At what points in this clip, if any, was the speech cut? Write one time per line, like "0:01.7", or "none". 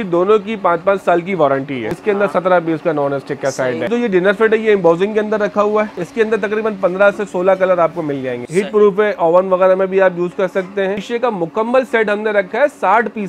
0:01.9
0:03.9
0:06.0
0:08.4
0:11.0